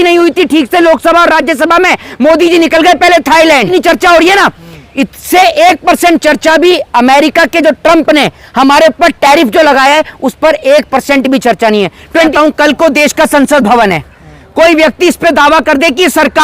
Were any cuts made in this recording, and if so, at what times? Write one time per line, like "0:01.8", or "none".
0:03.7
0:12.3